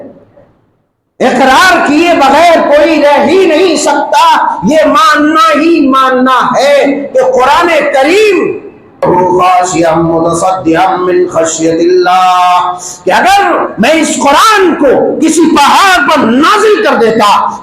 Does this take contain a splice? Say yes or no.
yes